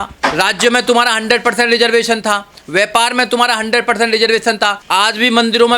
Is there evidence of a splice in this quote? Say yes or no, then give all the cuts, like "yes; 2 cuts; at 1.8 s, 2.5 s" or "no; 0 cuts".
yes; 1 cut; at 4.8 s